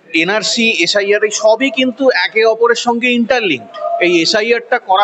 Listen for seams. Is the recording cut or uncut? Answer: uncut